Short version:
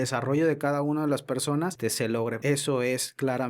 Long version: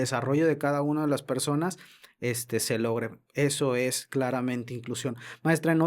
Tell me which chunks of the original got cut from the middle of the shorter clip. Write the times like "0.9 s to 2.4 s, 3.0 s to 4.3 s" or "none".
2.2 s to 3.1 s